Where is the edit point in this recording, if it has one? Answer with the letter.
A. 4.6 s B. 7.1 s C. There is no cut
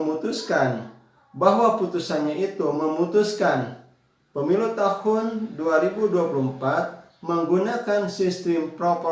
C